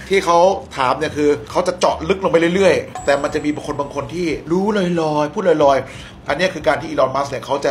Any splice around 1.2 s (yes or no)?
no